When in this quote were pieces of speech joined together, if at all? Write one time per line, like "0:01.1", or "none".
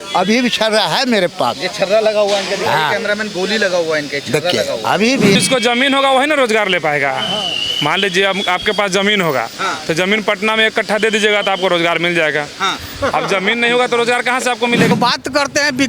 0:05.4
0:14.9